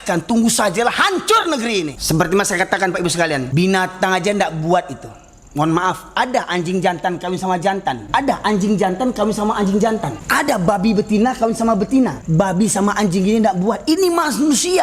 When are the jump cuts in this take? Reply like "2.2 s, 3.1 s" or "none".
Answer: 2.0 s, 3.5 s, 8.0 s, 10.2 s, 12.2 s